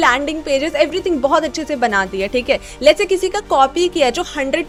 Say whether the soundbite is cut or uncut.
uncut